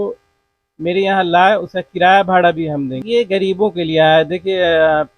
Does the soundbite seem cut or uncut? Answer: cut